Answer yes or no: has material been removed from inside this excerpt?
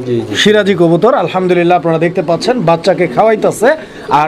no